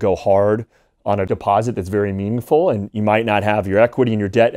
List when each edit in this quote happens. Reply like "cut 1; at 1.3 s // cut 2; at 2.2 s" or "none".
cut 1; at 1.3 s